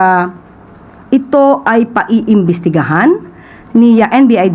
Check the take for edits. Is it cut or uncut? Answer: uncut